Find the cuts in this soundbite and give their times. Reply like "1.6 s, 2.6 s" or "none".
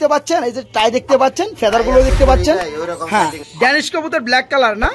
3.4 s